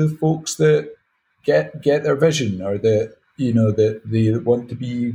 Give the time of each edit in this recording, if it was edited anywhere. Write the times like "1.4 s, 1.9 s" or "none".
none